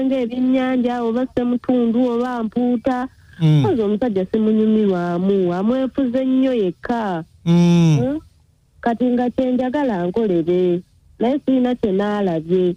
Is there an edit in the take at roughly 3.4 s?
no; 0 cuts

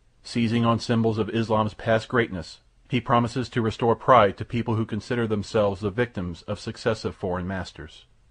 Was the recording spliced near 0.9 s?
yes; 1 cut; at 0.9 s

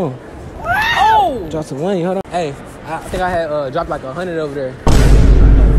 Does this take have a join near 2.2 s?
yes; 2 cuts; at 2.2 s, 4.8 s

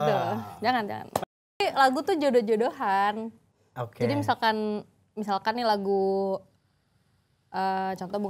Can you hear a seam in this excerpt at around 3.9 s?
no; 1 cut; at 1.3 s

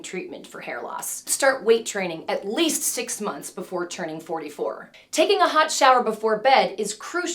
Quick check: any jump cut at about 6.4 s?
no; 2 cuts; at 1.2 s, 4.9 s

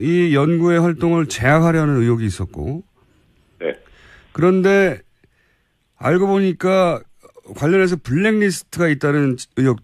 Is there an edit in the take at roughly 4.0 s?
no; 1 cut; at 1.3 s

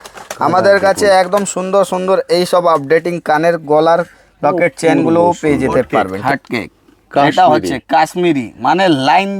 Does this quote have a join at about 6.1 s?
yes; 1 cut; at 6.1 s

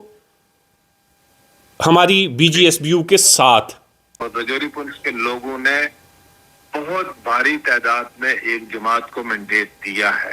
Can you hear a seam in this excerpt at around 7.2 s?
no; 1 cut; at 4.1 s

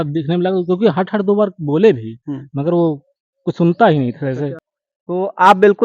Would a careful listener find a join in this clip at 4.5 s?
yes; 1 cut; at 4.5 s

